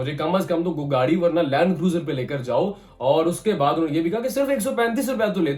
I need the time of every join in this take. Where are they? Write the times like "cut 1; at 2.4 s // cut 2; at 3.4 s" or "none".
none